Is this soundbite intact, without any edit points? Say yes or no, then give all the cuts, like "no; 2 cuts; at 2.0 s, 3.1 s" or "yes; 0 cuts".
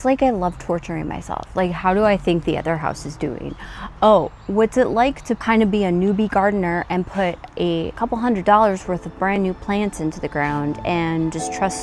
yes; 0 cuts